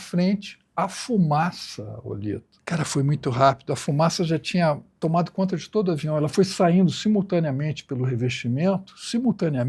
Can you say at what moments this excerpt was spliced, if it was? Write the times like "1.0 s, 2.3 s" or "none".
2.5 s, 4.9 s